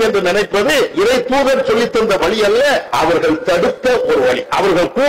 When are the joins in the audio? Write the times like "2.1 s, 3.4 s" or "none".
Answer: 0.9 s, 2.9 s

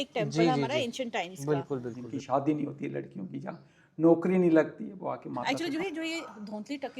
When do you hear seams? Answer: 2.0 s, 5.4 s

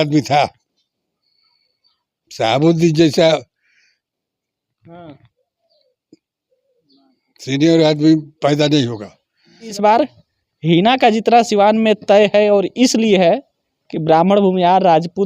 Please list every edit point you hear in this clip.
9.7 s

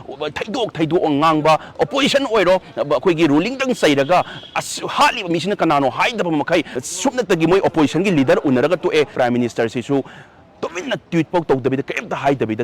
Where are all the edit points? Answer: 6.8 s, 9.1 s

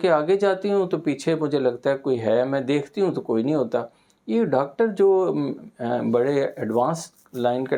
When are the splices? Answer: none

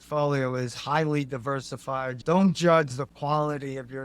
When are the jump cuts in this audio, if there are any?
2.1 s

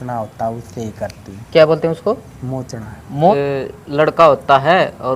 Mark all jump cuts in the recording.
3.3 s

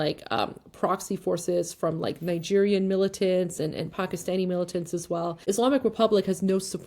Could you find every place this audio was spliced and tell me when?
5.4 s

